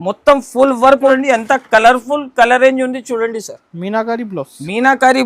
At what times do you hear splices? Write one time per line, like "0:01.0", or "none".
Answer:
0:01.1